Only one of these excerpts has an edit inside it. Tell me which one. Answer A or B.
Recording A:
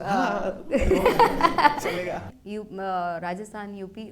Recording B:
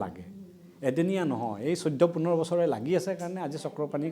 A